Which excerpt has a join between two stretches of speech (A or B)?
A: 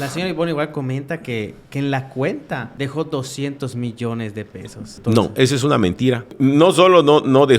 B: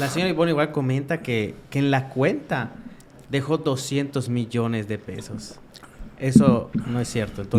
A